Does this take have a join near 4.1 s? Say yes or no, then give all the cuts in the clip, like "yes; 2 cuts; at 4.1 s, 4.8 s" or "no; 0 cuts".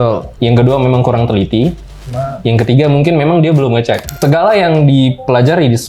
yes; 1 cut; at 4.1 s